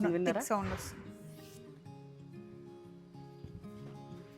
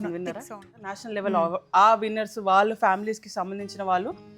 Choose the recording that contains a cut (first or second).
second